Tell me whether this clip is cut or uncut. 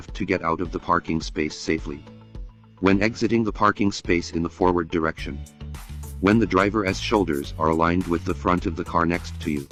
uncut